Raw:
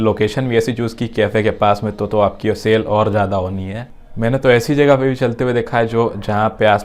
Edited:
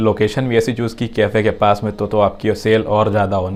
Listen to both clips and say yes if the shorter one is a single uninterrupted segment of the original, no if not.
yes